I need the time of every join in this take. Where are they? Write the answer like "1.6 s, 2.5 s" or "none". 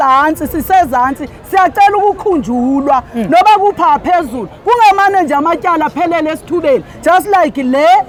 none